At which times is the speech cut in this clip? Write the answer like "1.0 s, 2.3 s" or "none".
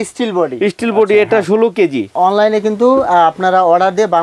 2.1 s